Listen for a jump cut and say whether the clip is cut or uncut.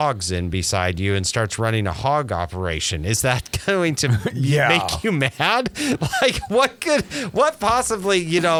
uncut